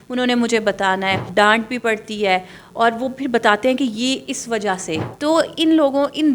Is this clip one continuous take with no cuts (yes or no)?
no